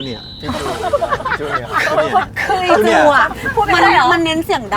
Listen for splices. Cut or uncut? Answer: uncut